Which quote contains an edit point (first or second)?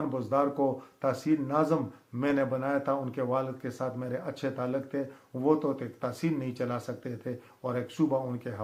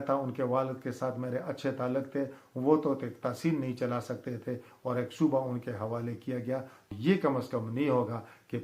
second